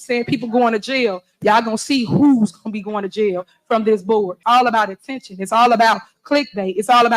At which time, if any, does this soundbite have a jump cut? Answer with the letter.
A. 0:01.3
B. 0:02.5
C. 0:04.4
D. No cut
C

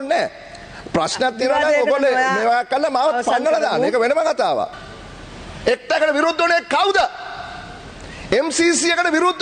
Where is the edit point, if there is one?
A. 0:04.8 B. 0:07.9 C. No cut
A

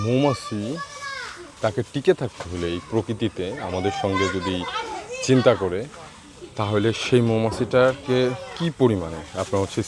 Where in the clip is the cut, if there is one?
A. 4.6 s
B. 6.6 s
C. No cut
C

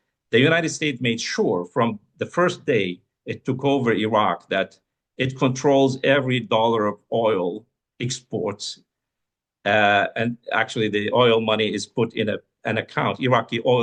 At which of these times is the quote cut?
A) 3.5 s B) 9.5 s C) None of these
C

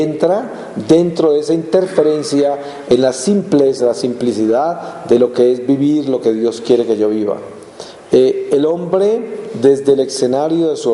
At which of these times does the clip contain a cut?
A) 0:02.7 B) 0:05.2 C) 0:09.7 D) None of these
B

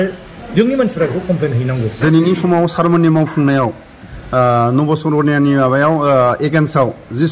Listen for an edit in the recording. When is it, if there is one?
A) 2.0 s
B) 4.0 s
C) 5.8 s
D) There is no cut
A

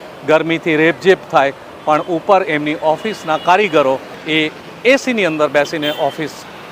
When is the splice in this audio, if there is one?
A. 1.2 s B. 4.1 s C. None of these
B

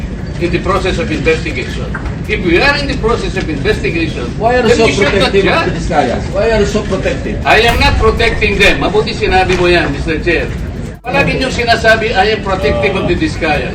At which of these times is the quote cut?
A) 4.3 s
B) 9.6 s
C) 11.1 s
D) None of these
C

